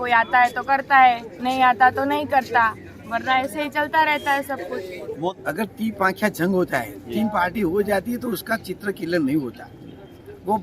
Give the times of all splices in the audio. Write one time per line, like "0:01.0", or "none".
0:05.3